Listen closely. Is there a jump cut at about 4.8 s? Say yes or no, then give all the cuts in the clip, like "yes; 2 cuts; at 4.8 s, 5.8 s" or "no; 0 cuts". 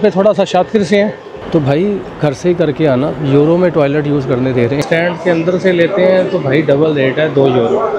yes; 2 cuts; at 1.3 s, 4.8 s